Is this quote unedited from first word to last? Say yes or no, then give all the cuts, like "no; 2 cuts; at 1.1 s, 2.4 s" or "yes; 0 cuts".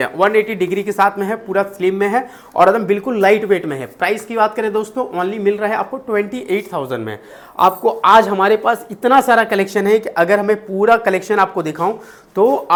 yes; 0 cuts